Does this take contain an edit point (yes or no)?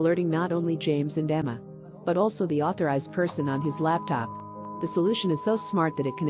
no